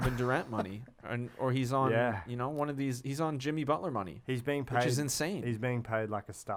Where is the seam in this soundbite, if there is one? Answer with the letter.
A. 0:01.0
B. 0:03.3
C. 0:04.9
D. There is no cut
D